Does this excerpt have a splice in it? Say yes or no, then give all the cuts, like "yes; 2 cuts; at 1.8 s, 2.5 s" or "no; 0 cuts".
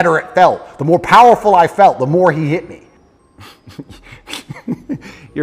yes; 1 cut; at 2.8 s